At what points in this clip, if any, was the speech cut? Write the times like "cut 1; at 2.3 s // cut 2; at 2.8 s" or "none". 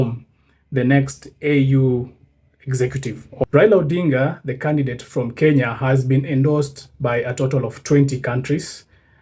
cut 1; at 3.4 s